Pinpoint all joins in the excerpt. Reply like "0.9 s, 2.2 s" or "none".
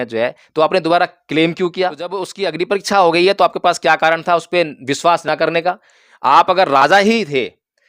2.3 s